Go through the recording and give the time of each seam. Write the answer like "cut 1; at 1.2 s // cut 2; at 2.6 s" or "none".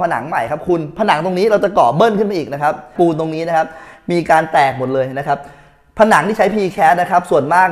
cut 1; at 2.9 s